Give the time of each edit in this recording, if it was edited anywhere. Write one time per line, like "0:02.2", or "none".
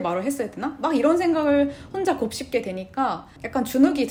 none